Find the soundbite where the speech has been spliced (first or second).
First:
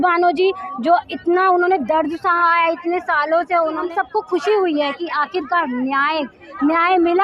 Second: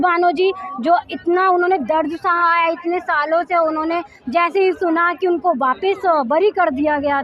first